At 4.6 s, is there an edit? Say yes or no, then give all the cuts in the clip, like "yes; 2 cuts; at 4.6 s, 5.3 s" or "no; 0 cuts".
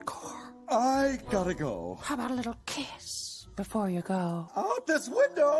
yes; 1 cut; at 4.6 s